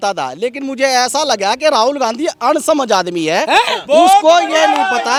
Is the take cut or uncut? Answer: uncut